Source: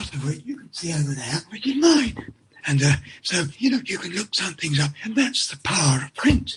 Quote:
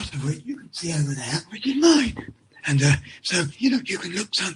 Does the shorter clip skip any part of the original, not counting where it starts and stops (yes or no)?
no